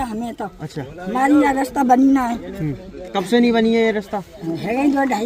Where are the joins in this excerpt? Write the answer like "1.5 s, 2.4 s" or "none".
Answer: none